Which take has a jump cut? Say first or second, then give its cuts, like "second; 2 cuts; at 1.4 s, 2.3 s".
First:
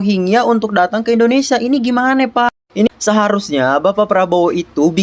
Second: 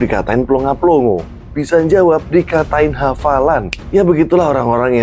first; 1 cut; at 2.9 s